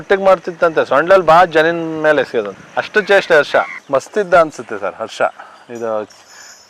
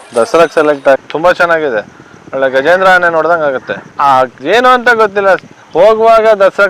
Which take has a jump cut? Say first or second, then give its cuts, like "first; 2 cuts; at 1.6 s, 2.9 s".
second; 1 cut; at 1.0 s